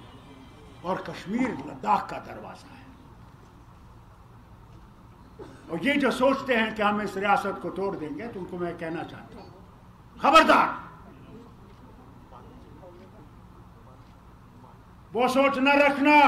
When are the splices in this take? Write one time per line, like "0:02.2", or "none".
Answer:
none